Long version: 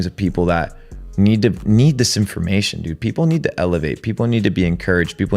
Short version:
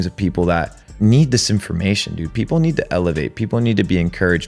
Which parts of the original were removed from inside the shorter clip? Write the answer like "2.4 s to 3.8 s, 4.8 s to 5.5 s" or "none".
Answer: 0.9 s to 1.6 s